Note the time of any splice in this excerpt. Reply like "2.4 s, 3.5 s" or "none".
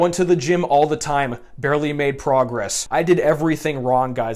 2.8 s